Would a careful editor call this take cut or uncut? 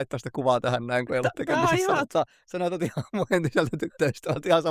uncut